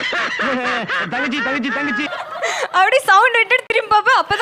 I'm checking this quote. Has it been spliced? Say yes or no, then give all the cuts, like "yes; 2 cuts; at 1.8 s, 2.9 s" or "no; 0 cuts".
no; 0 cuts